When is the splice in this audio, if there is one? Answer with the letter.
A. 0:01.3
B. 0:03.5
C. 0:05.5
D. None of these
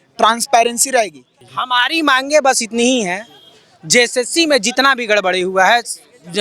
A